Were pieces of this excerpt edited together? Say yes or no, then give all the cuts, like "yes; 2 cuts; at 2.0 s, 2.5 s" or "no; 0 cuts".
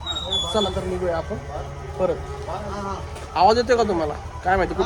no; 0 cuts